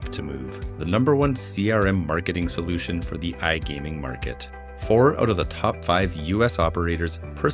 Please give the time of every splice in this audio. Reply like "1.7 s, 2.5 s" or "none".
none